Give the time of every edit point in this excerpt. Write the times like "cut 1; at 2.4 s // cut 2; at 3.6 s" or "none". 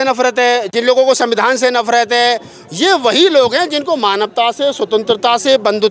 none

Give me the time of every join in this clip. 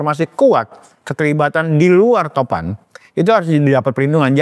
none

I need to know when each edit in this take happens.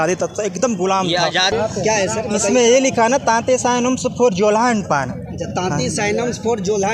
cut 1; at 1.5 s

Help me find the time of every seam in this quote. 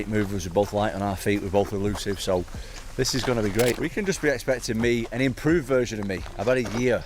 cut 1; at 3.7 s

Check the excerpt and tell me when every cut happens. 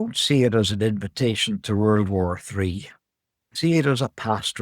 cut 1; at 3.4 s

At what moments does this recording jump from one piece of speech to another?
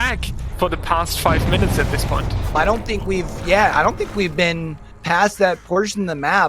cut 1; at 2.5 s

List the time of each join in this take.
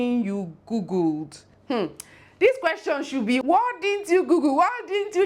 cut 1; at 3.4 s

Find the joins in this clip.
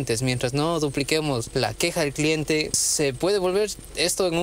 cut 1; at 1.5 s // cut 2; at 2.8 s

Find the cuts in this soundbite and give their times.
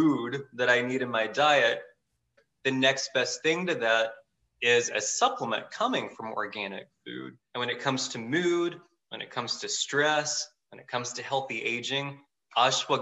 cut 1; at 2.4 s // cut 2; at 7.3 s

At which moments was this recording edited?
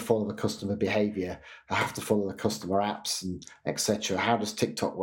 none

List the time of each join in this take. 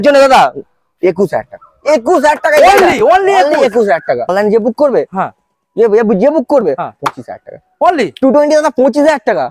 cut 1; at 4.2 s

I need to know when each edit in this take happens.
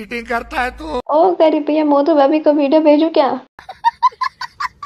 cut 1; at 1.0 s // cut 2; at 3.6 s

